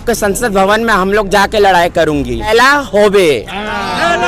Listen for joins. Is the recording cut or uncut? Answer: cut